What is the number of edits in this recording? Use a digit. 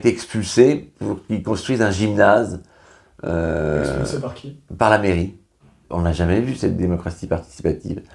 1